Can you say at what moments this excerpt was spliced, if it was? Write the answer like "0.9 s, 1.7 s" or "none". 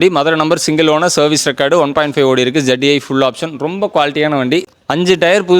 4.7 s